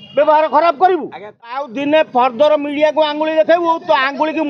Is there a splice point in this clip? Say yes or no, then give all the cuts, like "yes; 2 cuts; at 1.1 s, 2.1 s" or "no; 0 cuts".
yes; 1 cut; at 1.7 s